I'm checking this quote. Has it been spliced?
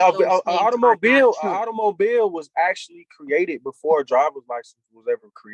no; 0 cuts

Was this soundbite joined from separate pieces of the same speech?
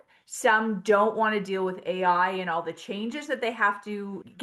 no; 0 cuts

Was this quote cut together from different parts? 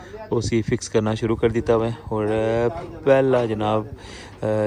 no; 0 cuts

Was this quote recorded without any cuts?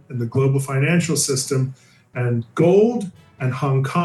yes; 0 cuts

